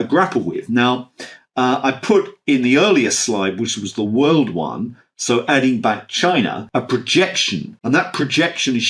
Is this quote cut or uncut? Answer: cut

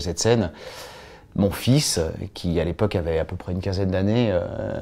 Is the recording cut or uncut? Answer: uncut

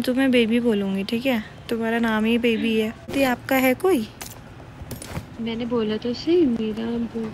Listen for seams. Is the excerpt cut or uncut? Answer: cut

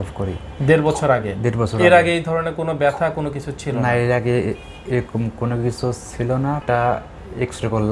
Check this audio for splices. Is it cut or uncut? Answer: cut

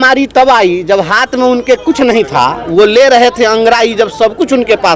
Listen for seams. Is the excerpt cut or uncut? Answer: uncut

